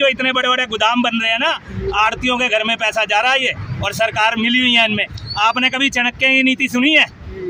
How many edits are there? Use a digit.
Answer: 0